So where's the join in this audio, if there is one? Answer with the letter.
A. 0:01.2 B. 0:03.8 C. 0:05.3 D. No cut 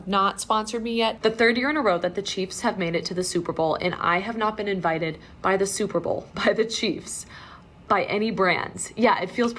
A